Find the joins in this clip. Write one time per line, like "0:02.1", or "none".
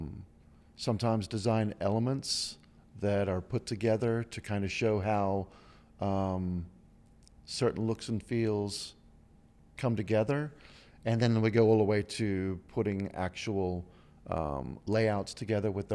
none